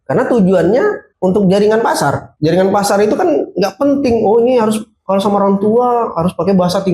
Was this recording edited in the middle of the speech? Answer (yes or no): yes